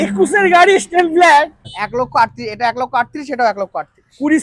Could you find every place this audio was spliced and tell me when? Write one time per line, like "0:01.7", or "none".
0:01.8